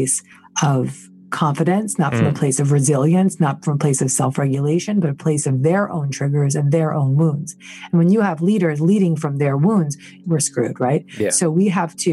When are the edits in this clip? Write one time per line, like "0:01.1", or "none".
0:10.2